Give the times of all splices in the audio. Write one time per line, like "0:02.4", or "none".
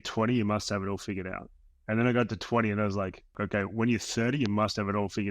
0:03.4